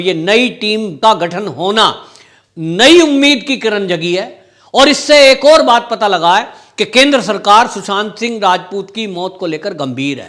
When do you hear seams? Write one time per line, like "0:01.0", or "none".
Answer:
0:00.9

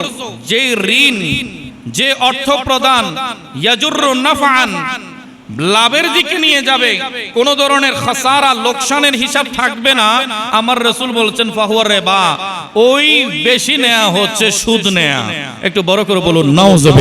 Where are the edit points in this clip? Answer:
none

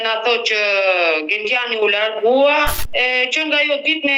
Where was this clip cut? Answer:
0:02.8

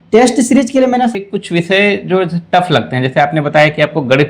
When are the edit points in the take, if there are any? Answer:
0:01.2

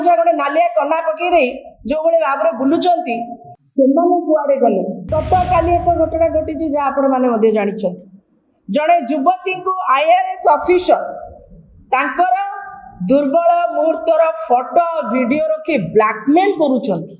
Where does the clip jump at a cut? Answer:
0:05.1

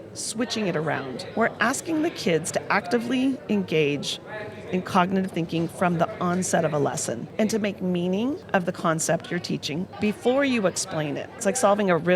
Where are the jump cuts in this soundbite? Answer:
0:01.2
0:07.2
0:08.4
0:09.9
0:11.4

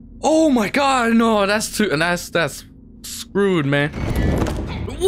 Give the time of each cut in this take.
none

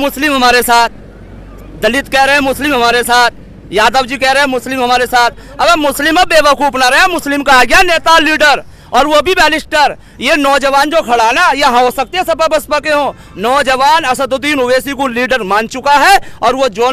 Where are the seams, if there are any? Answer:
none

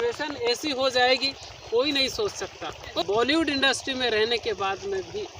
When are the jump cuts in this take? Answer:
0:02.8

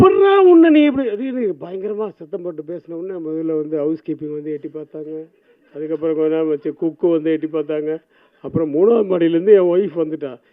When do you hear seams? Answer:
none

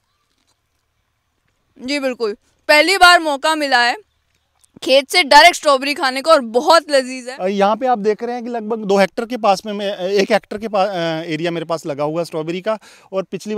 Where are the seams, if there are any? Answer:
0:07.2

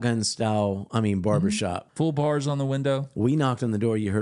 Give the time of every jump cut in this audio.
0:00.8
0:01.8
0:03.1

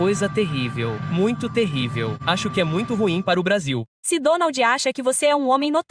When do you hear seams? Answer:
0:02.2
0:03.9

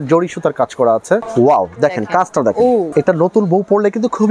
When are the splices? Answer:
0:01.3
0:02.9

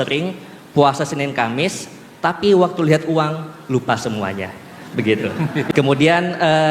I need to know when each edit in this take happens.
0:05.7

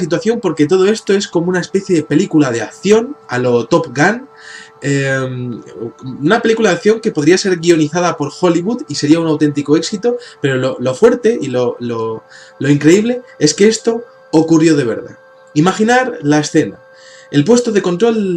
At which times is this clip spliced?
0:08.6

